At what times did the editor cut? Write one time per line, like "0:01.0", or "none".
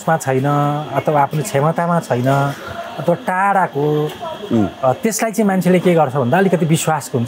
none